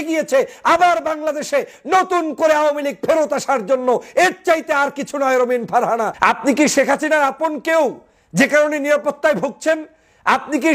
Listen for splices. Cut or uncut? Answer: cut